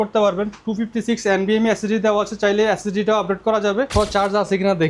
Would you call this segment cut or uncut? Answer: cut